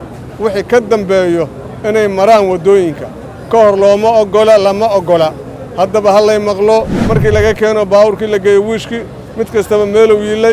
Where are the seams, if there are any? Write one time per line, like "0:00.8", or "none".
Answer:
0:07.0